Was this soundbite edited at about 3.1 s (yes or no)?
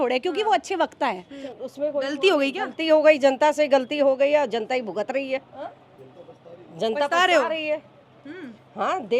no